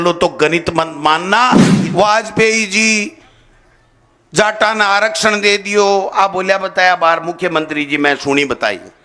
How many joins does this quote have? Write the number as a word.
one